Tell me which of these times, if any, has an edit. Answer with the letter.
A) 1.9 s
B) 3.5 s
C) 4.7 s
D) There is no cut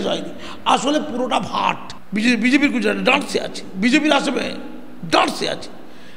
A